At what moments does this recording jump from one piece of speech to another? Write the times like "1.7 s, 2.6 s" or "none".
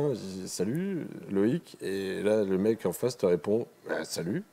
none